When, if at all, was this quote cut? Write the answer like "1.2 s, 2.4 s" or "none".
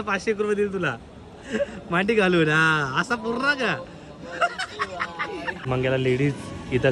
5.6 s